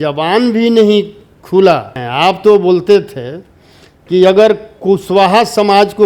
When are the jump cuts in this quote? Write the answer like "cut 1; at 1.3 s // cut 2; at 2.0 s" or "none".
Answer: cut 1; at 2.0 s